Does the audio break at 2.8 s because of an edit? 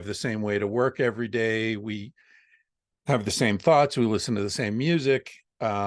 no; 0 cuts

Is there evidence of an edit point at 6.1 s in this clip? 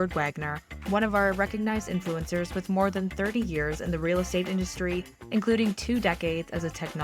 no; 0 cuts

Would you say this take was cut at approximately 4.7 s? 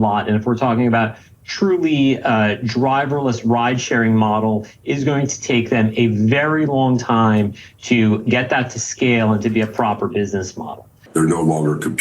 no; 1 cut; at 10.9 s

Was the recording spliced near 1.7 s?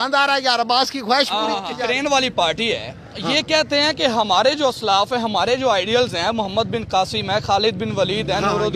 yes; 1 cut; at 1.7 s

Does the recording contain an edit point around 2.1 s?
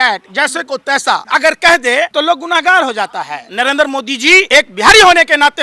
yes; 4 cuts; at 1.2 s, 2.1 s, 3.4 s, 4.5 s

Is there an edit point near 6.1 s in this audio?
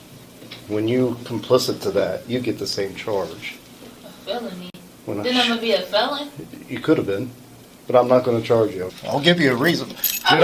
no; 1 cut; at 8.9 s

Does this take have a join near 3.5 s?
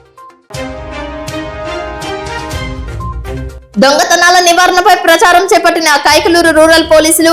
yes; 1 cut; at 3.5 s

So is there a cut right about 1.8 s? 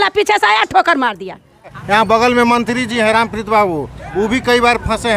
yes; 1 cut; at 1.8 s

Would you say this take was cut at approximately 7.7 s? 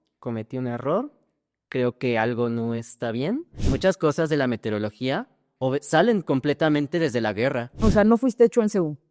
yes; 2 cuts; at 3.5 s, 7.7 s

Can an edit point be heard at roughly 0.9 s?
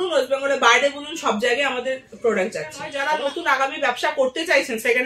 no; 1 cut; at 2.9 s

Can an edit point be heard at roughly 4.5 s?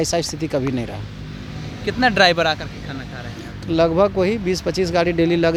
no; 0 cuts

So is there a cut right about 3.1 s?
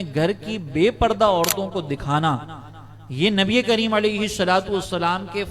no; 0 cuts

